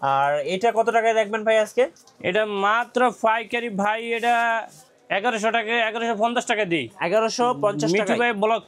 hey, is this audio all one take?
yes; 0 cuts

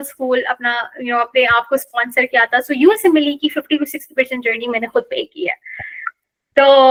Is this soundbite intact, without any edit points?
yes; 0 cuts

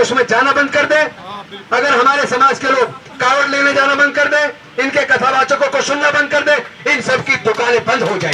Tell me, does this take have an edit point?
no; 0 cuts

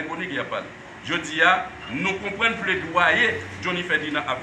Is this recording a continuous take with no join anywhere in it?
yes; 0 cuts

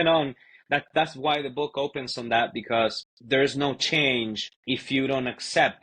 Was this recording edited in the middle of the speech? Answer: yes; 2 cuts; at 3.1 s, 4.5 s

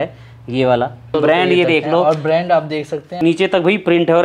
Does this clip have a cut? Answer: yes; 2 cuts; at 1.1 s, 3.2 s

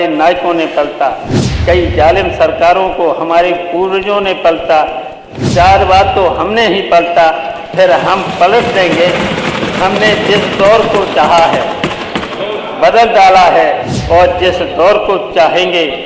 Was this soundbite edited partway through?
no; 0 cuts

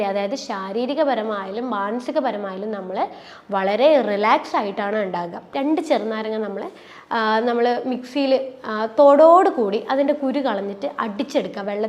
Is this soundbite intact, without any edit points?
no; 1 cut; at 5.4 s

